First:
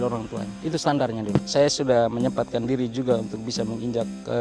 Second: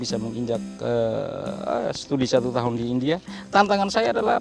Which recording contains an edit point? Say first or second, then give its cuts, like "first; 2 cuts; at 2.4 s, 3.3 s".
first; 1 cut; at 1.5 s